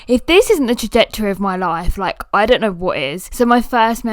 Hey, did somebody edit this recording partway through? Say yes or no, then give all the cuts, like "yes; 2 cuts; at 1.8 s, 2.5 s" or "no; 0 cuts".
yes; 1 cut; at 3.2 s